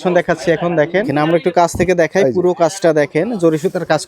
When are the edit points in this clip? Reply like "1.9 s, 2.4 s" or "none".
1.1 s

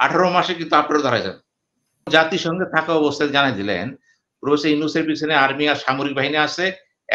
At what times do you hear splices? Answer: 2.1 s

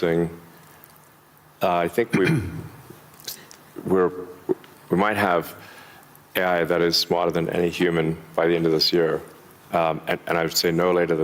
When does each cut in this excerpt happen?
none

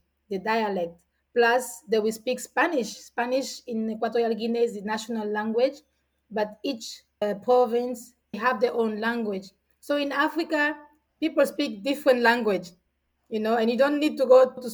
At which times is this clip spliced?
8.4 s

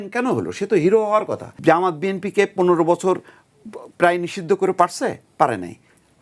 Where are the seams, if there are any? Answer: 1.4 s

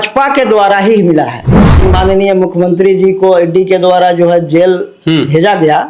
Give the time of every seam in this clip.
1.8 s

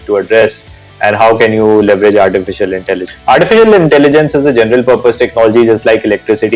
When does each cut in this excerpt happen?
3.1 s

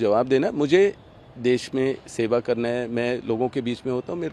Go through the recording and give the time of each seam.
none

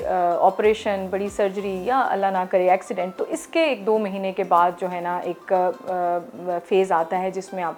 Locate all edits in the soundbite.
none

